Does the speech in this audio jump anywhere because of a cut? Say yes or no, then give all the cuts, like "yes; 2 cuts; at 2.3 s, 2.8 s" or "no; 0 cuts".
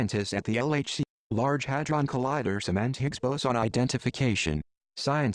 no; 0 cuts